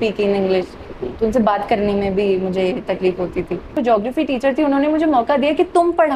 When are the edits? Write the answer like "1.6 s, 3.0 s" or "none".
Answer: 3.8 s